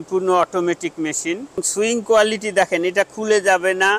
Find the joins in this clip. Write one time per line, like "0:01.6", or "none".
0:01.6